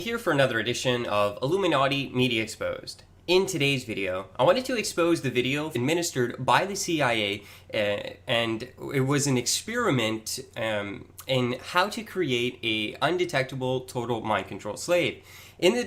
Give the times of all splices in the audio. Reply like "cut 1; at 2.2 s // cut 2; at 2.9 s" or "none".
none